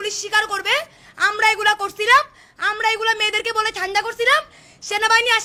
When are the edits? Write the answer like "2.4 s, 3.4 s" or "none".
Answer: none

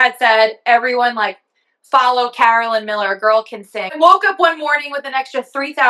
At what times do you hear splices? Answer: 3.9 s

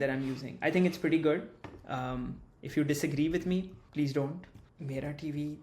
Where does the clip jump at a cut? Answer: none

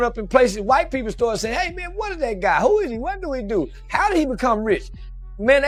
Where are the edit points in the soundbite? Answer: none

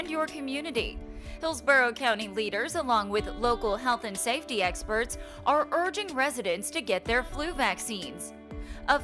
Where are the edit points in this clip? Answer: none

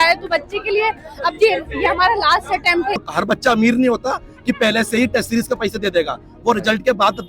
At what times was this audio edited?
3.1 s

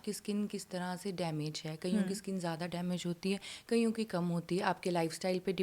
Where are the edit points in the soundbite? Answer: none

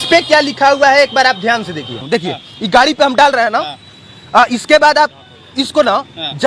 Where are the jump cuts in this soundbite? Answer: 2.0 s

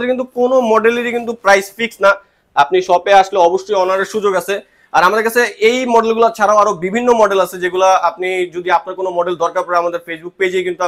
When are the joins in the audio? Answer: none

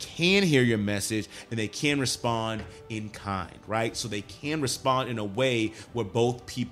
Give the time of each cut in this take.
none

